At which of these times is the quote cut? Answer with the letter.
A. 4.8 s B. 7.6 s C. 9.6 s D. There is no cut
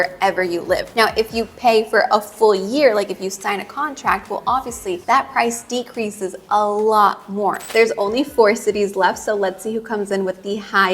B